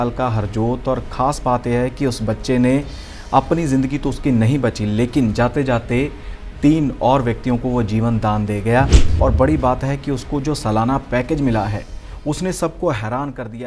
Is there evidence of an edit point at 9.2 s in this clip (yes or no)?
yes